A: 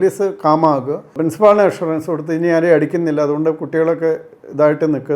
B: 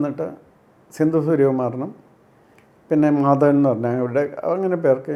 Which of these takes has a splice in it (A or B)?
A